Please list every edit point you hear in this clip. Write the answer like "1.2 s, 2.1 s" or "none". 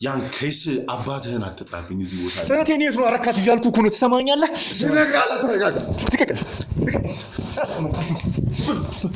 none